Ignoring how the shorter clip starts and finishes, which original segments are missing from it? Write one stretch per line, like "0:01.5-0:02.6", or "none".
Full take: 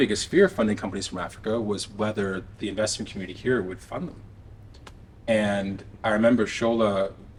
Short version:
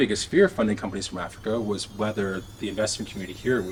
none